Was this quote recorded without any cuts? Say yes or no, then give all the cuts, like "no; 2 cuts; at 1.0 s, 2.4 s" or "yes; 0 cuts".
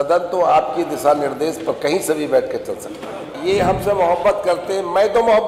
no; 1 cut; at 3.3 s